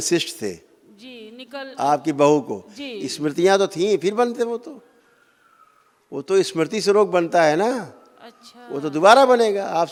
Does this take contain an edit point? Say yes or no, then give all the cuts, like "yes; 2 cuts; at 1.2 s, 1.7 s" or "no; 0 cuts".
no; 0 cuts